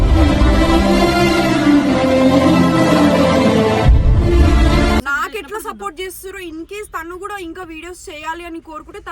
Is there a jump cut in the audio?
yes; 1 cut; at 5.1 s

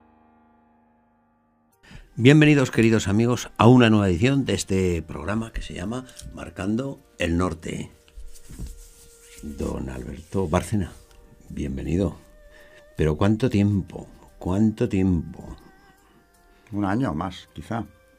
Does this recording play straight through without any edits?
no; 1 cut; at 0.9 s

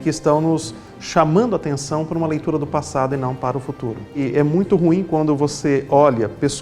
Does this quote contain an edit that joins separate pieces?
yes; 1 cut; at 4.2 s

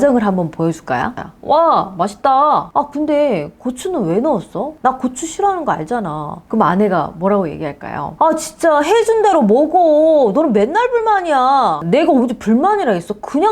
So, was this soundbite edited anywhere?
yes; 3 cuts; at 1.2 s, 8.1 s, 11.8 s

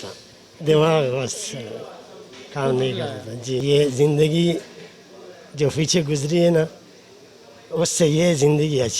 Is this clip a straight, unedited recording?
no; 1 cut; at 3.6 s

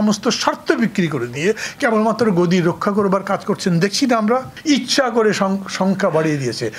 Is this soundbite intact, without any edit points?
no; 1 cut; at 4.5 s

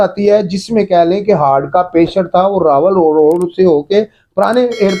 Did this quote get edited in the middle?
no; 0 cuts

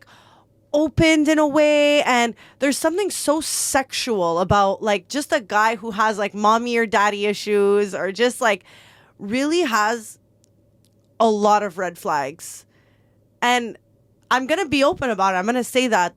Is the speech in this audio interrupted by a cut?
no; 0 cuts

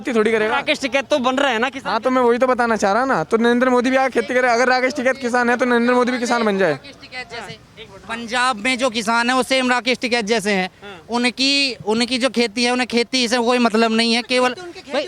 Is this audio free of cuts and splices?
yes; 0 cuts

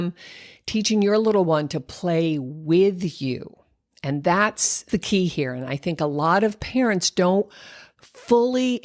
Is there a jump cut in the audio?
yes; 1 cut; at 4.8 s

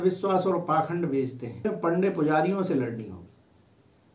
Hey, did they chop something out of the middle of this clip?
yes; 1 cut; at 1.6 s

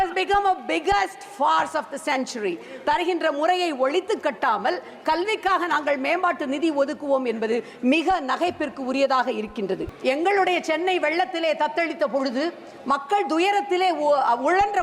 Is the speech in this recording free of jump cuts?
no; 1 cut; at 9.9 s

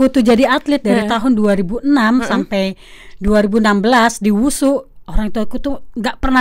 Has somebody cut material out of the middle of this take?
no; 0 cuts

